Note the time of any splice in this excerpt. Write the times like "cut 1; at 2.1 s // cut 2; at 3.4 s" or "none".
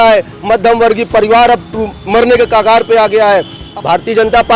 cut 1; at 3.6 s